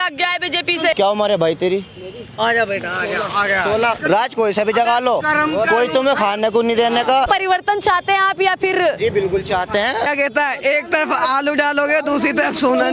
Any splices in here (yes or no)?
yes